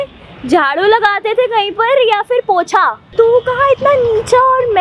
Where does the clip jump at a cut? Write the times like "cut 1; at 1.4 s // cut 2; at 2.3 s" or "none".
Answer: cut 1; at 3.1 s